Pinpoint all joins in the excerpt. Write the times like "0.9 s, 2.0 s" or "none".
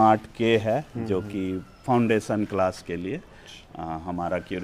none